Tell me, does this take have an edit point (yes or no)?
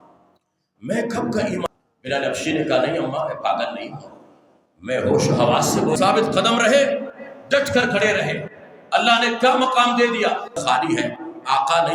yes